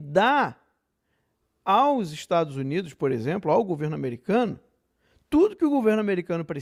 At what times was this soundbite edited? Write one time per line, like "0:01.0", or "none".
none